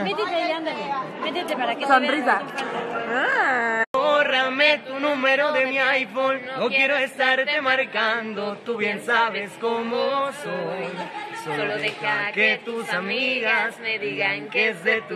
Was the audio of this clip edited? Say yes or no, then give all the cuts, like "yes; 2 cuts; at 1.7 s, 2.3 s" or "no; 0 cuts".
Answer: yes; 1 cut; at 4.8 s